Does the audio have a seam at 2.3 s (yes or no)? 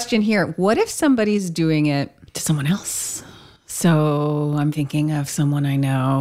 yes